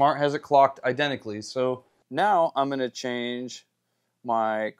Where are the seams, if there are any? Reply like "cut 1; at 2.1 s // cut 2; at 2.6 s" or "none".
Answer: cut 1; at 1.9 s